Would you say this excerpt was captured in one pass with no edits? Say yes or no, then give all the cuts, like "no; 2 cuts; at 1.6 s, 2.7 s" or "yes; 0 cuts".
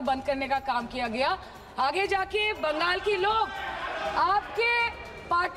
yes; 0 cuts